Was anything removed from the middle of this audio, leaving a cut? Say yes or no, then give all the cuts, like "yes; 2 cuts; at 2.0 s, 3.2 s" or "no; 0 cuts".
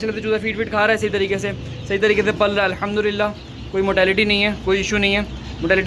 no; 0 cuts